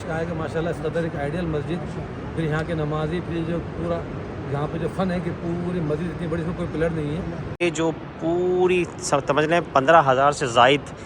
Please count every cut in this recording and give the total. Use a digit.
1